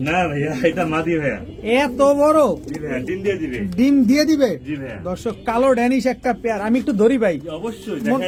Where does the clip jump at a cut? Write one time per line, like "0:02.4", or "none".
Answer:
none